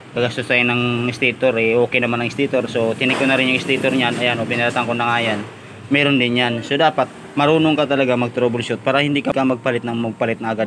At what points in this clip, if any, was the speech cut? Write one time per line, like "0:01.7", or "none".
0:09.3